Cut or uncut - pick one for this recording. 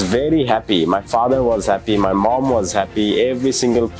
uncut